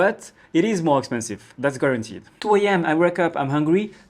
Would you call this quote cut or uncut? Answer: cut